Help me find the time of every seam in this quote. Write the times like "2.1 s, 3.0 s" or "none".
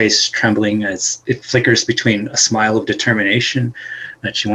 1.2 s